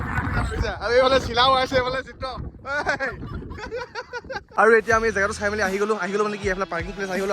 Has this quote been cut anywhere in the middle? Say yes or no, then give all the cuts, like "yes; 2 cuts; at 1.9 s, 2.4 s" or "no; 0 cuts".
yes; 1 cut; at 4.5 s